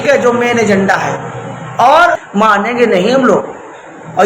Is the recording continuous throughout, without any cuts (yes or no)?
no